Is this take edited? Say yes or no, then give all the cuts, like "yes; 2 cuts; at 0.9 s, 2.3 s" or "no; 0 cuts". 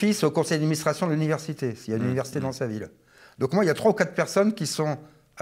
no; 0 cuts